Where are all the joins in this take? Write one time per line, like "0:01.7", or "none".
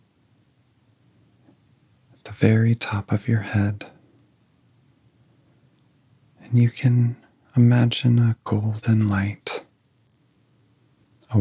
0:01.0

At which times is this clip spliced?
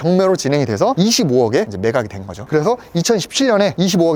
none

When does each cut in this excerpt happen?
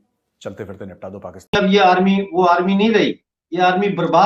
0:01.6

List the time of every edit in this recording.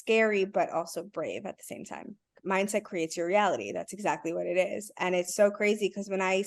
0:02.4

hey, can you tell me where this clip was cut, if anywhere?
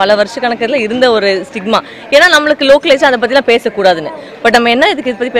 none

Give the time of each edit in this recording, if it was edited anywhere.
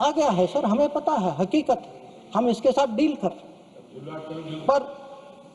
none

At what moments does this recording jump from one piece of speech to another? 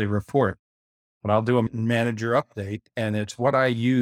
0:01.7

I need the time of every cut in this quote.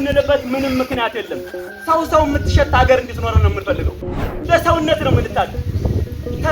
0:04.1

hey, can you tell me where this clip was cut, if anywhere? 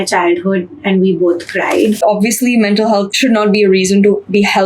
0:02.0
0:03.1

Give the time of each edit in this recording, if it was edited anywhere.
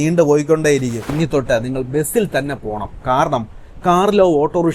0:01.1

